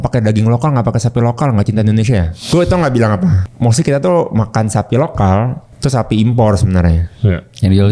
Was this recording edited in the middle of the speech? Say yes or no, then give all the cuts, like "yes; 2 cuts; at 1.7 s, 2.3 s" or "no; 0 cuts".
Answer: yes; 3 cuts; at 2.4 s, 3.5 s, 5.6 s